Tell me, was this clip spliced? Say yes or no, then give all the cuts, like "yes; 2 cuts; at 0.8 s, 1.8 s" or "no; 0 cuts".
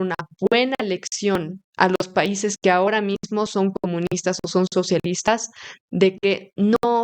no; 0 cuts